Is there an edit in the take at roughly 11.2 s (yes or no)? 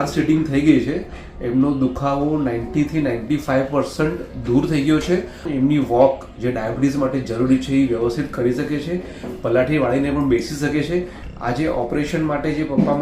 yes